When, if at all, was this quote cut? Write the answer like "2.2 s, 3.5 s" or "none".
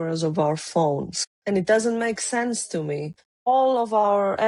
1.4 s, 3.3 s